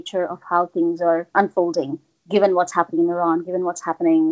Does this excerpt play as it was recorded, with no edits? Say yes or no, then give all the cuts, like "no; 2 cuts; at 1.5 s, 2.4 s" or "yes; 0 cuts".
no; 1 cut; at 1.3 s